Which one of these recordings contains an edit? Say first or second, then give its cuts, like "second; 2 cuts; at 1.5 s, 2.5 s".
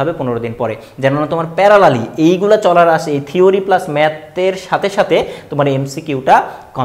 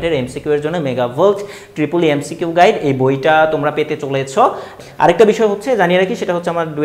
second; 1 cut; at 4.7 s